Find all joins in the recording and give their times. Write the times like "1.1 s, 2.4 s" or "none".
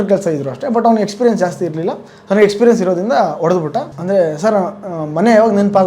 3.9 s